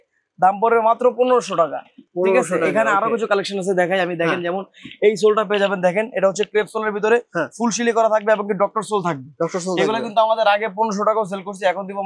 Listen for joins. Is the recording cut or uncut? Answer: uncut